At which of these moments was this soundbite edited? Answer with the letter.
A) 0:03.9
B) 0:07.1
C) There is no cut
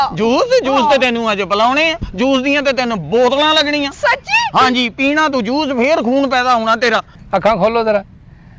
B